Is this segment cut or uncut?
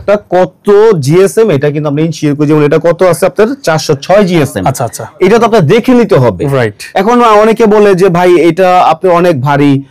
uncut